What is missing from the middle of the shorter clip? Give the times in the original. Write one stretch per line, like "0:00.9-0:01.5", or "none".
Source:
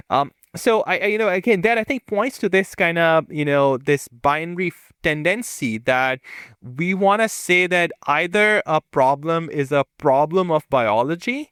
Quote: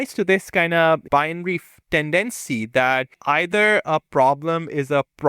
0:03.3-0:04.2
0:06.3-0:08.0

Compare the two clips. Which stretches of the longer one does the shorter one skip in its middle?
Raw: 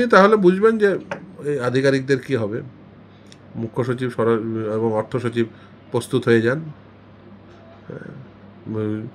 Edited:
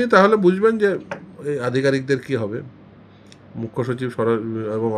none

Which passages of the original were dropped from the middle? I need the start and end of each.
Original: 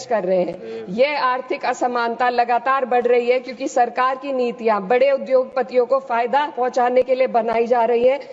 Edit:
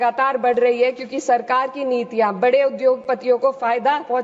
none

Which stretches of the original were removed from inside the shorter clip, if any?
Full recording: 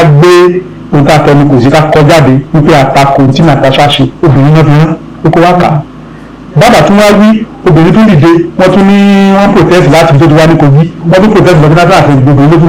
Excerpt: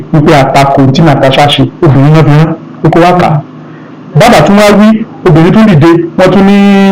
none

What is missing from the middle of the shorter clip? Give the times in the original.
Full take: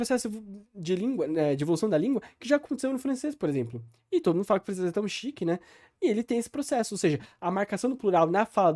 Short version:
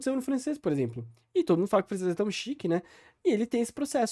none

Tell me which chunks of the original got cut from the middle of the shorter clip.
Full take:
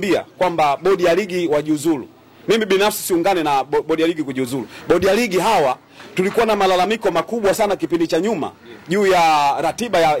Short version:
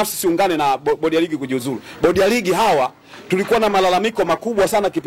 none

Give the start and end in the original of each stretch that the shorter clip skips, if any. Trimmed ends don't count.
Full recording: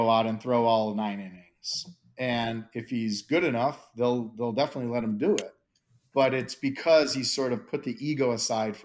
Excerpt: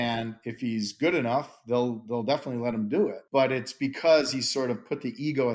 0:05.5-0:06.0

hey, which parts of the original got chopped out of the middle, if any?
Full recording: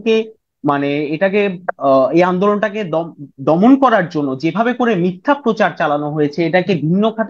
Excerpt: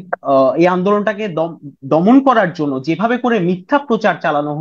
none

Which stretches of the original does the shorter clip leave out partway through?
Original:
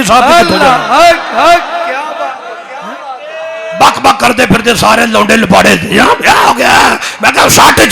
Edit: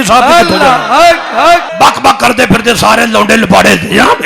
0:01.7-0:03.7

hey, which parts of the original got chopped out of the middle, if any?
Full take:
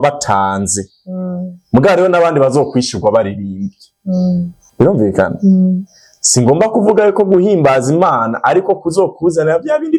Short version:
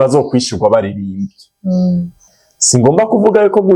0:04.7-0:05.9

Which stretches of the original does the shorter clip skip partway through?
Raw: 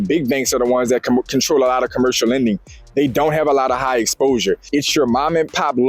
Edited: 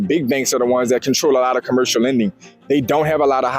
0:01.0-0:01.3

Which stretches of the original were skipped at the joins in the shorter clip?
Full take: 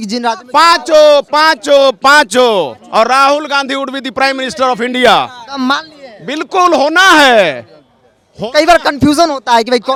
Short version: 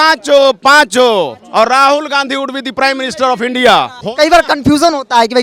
0:05.4-0:08.3

